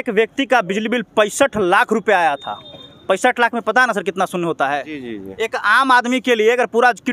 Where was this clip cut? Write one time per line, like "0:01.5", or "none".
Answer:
none